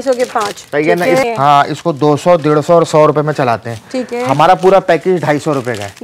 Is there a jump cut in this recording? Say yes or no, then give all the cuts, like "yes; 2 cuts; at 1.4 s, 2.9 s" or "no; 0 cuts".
yes; 1 cut; at 1.2 s